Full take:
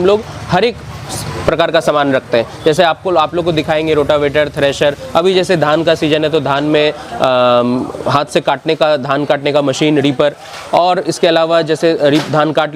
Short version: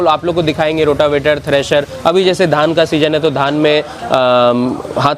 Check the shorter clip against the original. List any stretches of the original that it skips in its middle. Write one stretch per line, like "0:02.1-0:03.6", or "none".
none